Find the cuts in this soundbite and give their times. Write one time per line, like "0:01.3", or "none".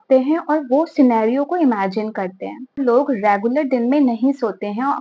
0:02.8